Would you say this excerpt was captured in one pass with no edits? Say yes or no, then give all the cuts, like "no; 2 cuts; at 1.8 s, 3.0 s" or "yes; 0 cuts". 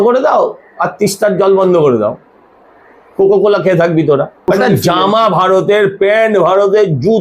no; 1 cut; at 4.3 s